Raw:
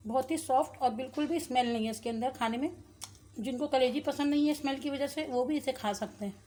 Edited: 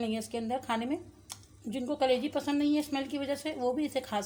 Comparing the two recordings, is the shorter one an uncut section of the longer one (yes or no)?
yes